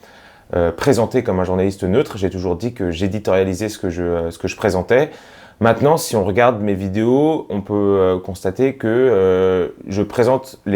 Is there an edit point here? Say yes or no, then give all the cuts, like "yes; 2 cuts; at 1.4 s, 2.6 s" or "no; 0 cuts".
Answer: no; 0 cuts